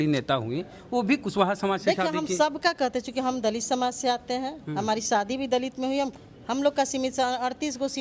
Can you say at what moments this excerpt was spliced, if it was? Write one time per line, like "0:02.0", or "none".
none